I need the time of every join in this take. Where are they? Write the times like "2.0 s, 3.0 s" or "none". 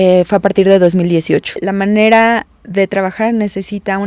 1.7 s

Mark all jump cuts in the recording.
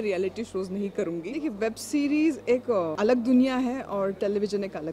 1.3 s, 2.7 s

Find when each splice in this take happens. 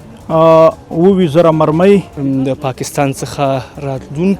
2.1 s

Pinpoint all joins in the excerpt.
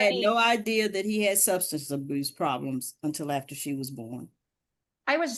none

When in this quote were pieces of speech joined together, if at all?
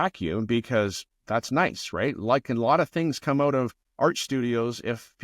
1.1 s, 3.8 s

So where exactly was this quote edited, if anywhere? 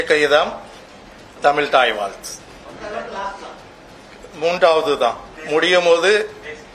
2.6 s, 5.3 s

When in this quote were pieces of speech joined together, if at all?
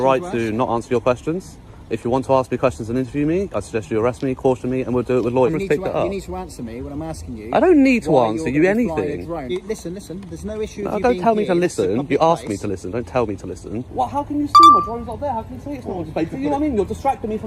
5.5 s, 9.5 s, 13.9 s

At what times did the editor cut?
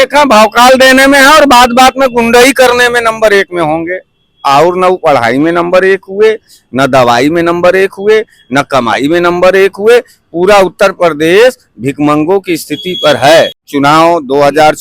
13.7 s

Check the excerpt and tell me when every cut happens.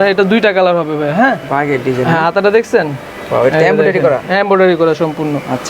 none

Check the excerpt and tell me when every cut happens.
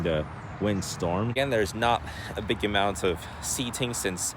1.3 s

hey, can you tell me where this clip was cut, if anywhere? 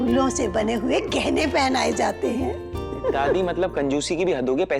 none

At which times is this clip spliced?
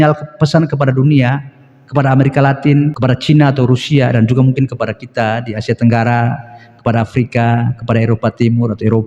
3.0 s

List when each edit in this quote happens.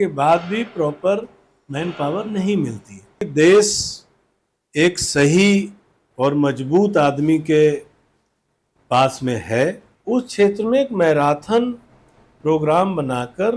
3.2 s, 9.9 s

